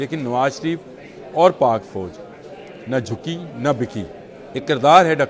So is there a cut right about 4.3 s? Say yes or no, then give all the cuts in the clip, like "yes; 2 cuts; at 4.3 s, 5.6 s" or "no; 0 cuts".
yes; 1 cut; at 4.3 s